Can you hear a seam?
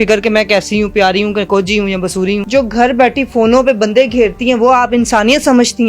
yes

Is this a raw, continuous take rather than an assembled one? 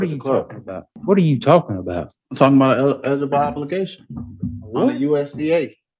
no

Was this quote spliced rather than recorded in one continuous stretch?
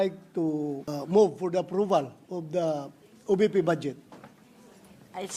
yes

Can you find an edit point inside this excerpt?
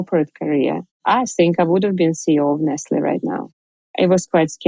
yes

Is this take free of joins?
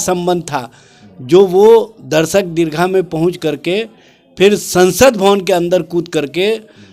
yes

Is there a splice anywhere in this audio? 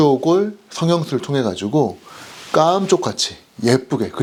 no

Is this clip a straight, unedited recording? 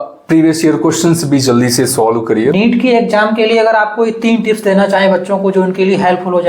no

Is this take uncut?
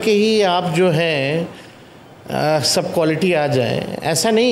yes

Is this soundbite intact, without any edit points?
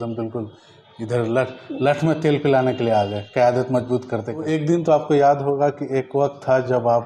no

